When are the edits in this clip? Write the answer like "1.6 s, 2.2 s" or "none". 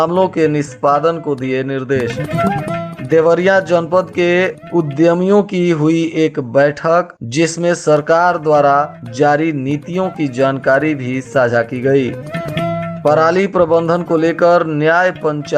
none